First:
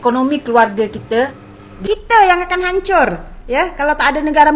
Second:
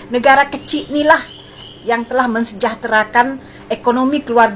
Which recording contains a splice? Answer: first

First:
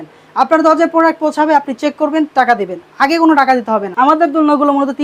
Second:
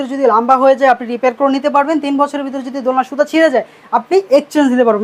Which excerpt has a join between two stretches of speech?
first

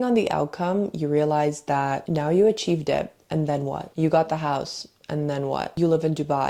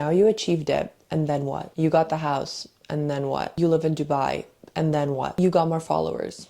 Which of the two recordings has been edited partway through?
second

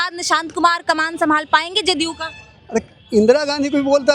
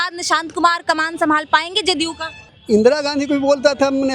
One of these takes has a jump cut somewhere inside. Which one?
second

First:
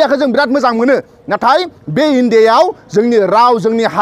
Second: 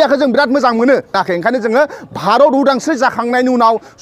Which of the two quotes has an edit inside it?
second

